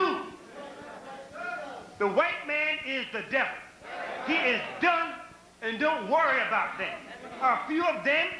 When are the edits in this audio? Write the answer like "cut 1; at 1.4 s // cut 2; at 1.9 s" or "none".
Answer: cut 1; at 1.3 s